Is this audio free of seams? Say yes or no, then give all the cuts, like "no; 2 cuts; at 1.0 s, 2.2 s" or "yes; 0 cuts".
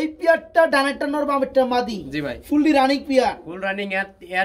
yes; 0 cuts